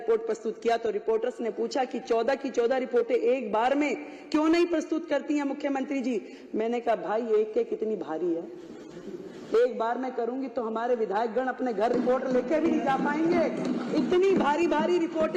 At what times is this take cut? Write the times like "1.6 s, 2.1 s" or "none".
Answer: none